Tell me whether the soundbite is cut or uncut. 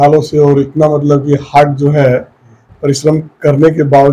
uncut